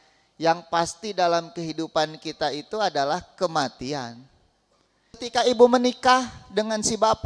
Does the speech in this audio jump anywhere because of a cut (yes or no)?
yes